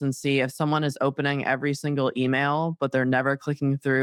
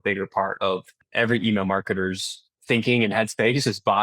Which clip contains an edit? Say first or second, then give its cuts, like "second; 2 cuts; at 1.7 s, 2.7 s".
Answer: second; 2 cuts; at 1.0 s, 2.5 s